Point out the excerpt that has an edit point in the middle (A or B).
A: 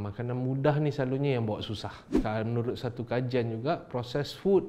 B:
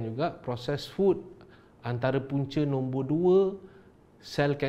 A